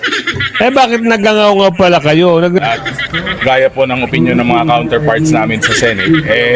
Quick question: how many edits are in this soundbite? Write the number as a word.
one